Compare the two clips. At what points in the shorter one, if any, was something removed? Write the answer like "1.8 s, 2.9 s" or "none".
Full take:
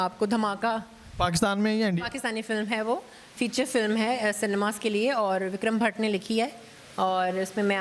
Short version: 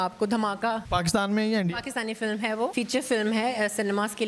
0.8 s, 2.7 s